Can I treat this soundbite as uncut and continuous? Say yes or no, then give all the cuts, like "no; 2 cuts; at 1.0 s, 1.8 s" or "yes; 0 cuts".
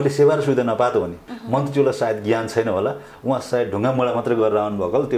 no; 1 cut; at 1.3 s